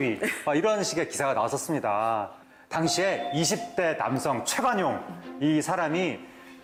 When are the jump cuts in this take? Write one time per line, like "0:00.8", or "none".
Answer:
none